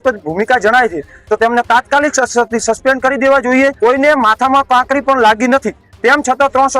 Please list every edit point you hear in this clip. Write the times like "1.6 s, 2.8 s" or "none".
3.7 s

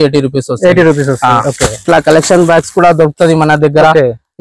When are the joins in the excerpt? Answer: 1.7 s

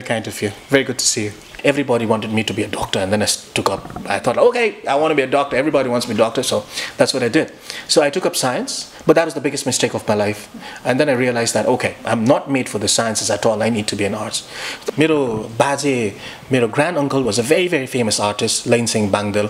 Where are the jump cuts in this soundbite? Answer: 1.5 s, 14.7 s

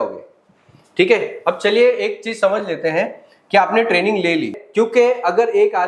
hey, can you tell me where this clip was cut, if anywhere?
4.6 s

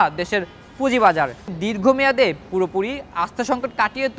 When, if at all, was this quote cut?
1.5 s

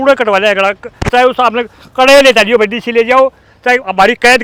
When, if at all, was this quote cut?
none

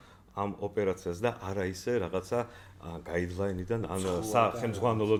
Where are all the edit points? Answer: none

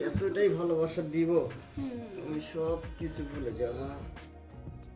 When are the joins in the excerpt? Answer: 4.1 s

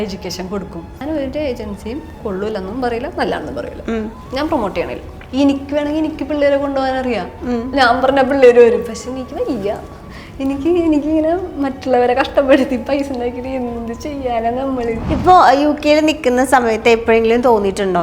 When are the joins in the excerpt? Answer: 1.0 s, 4.2 s, 5.2 s, 15.0 s

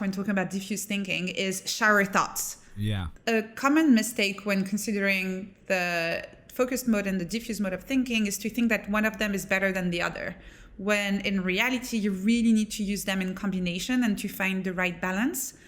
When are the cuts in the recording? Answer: 3.1 s

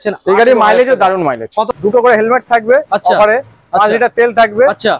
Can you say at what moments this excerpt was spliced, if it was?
1.7 s

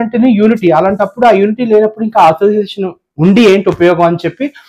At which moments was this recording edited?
none

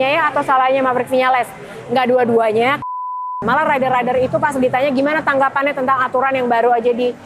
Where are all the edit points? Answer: 3.4 s

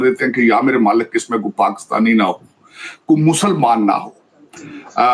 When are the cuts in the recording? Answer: none

